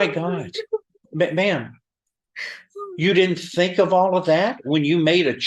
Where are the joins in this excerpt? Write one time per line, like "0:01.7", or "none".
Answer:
none